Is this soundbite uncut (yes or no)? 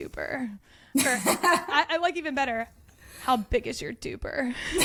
yes